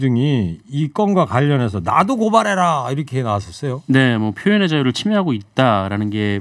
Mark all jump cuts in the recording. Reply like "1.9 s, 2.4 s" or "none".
none